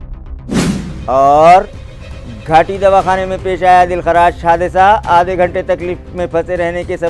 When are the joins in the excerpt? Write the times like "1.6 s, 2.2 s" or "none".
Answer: 0.9 s